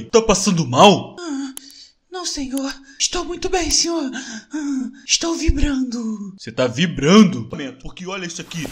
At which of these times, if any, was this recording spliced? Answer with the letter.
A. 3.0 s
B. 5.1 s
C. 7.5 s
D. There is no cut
C